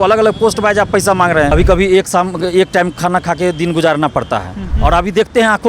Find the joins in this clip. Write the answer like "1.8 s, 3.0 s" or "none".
1.5 s, 4.7 s